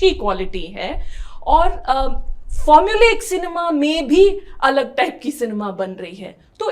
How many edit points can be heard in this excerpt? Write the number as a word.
zero